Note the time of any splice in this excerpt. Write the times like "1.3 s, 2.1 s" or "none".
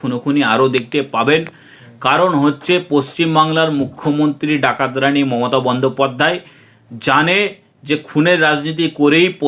none

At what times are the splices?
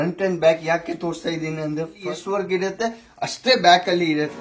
2.0 s

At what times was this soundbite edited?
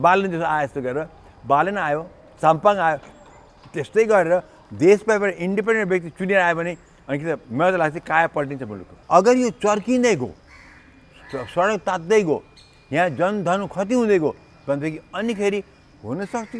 8.9 s

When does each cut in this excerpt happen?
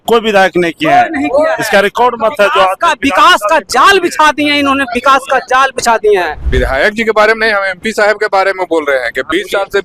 6.4 s

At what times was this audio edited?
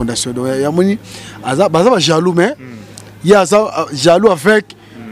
none

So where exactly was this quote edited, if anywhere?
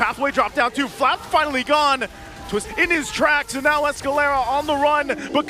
2.7 s

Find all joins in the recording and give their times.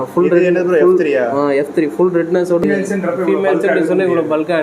2.6 s

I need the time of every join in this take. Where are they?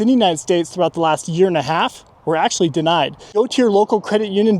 3.2 s

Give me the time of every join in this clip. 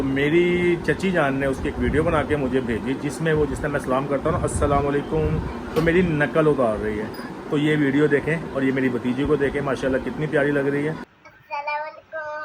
7.2 s, 11.1 s

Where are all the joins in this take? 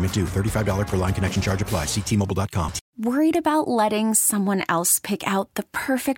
2.8 s

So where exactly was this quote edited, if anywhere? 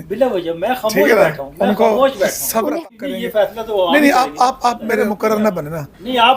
2.9 s, 5.1 s

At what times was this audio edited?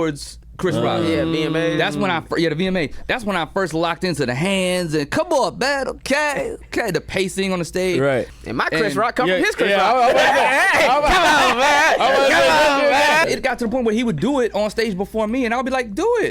8.3 s, 13.2 s

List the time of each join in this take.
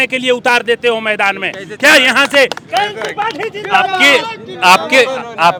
none

